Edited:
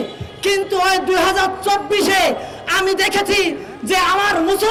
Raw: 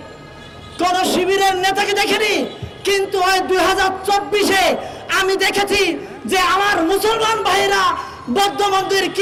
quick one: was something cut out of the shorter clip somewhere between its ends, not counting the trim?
no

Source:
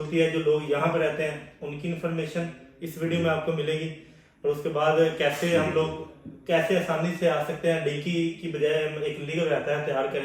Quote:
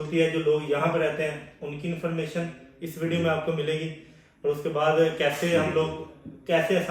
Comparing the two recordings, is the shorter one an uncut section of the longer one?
yes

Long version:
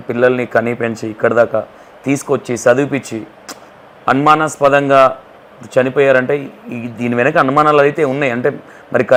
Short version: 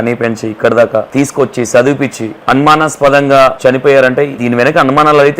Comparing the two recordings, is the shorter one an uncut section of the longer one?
no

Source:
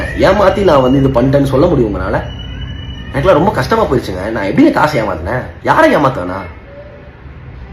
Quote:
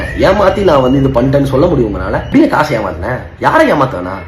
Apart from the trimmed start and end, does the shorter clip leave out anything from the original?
yes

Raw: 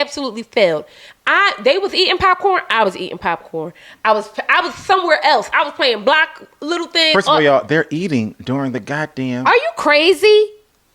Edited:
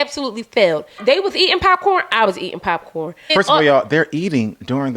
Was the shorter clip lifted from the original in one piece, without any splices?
no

